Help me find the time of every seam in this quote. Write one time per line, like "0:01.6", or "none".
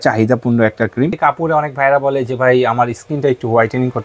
0:01.2